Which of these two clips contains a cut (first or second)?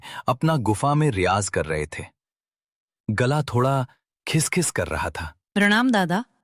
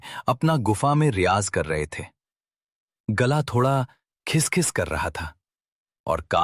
first